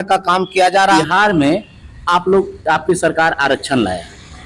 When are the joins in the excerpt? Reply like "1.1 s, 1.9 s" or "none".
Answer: 1.0 s